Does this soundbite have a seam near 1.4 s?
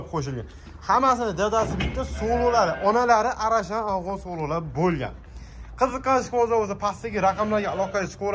no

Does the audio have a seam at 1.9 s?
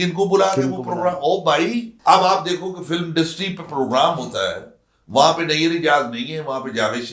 yes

